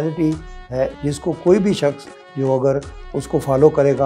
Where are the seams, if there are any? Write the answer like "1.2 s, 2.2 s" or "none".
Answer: 0.9 s